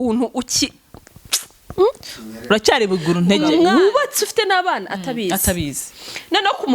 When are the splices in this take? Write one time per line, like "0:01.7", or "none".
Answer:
0:03.7